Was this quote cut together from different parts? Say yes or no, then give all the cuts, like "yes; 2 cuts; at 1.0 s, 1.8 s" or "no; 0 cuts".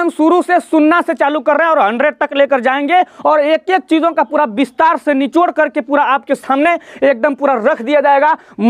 no; 0 cuts